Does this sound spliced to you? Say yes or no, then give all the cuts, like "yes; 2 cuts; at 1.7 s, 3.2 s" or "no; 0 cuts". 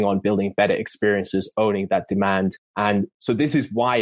no; 0 cuts